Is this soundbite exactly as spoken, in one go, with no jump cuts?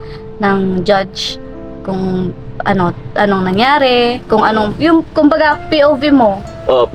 yes; 0 cuts

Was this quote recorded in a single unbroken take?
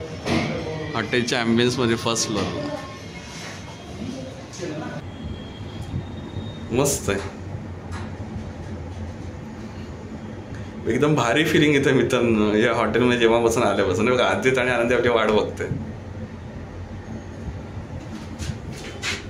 yes; 0 cuts

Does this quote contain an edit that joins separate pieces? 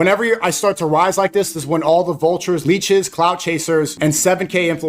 yes; 2 cuts; at 2.6 s, 3.9 s

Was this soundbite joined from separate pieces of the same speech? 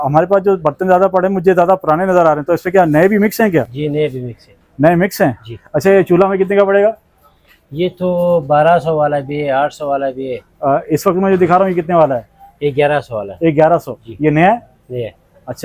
no; 0 cuts

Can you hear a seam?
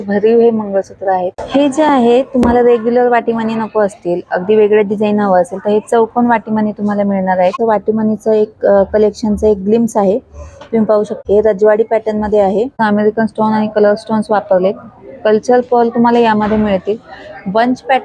yes; 4 cuts; at 1.3 s, 7.6 s, 11.2 s, 12.7 s

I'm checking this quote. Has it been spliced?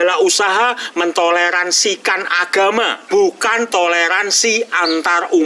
no; 0 cuts

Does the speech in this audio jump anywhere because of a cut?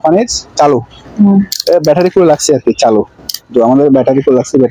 no; 0 cuts

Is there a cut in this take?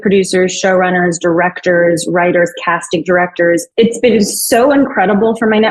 yes; 1 cut; at 3.7 s

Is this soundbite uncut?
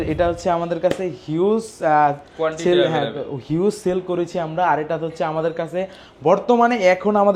yes; 0 cuts

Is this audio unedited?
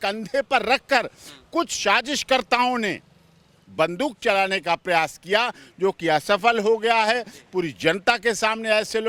yes; 0 cuts

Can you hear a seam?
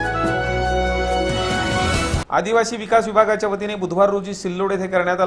yes; 1 cut; at 2.2 s

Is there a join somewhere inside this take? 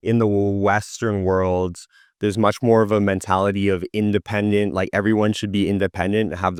no; 0 cuts

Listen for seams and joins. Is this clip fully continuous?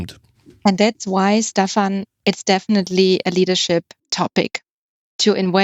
no; 1 cut; at 4.0 s

